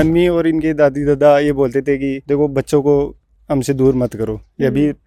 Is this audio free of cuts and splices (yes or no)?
yes